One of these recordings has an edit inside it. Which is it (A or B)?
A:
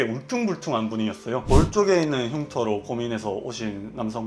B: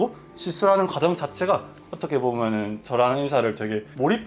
A